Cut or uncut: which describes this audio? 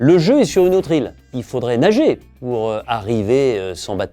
cut